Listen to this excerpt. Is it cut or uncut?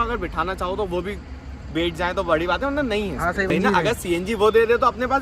cut